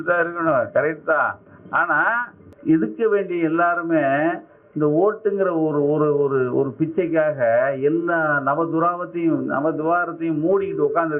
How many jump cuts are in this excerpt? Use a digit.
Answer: 1